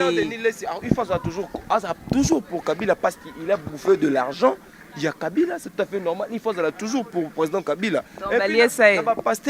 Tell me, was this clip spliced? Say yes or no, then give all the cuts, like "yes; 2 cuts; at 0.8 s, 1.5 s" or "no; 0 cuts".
no; 0 cuts